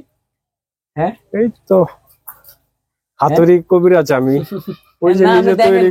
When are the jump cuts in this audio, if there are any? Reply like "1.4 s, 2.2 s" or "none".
none